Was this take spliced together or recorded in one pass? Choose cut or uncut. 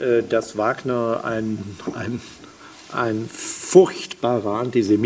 uncut